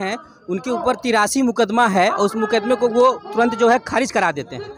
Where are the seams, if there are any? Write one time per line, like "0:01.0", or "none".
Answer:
none